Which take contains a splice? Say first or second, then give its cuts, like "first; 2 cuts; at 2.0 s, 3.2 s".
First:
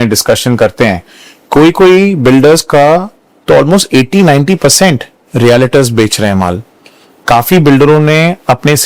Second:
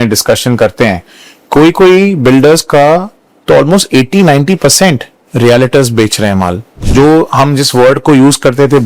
second; 1 cut; at 6.8 s